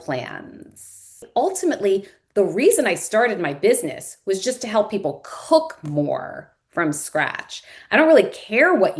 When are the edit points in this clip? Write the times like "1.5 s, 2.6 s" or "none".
1.3 s